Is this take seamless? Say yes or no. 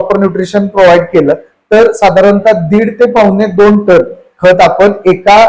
yes